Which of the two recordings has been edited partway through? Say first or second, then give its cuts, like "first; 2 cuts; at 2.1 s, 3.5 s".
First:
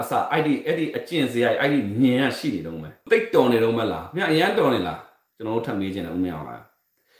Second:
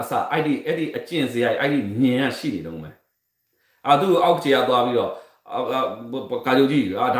first; 1 cut; at 3.0 s